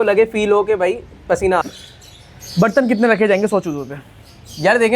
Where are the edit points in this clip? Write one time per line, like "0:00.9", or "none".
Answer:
0:01.6